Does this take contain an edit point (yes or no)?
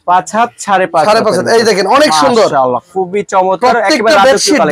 no